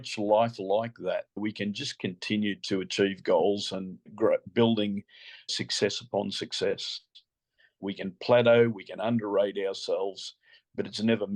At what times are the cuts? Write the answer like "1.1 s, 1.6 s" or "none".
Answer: 1.4 s, 4.0 s, 5.5 s, 7.8 s